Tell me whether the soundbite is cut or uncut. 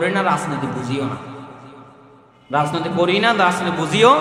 uncut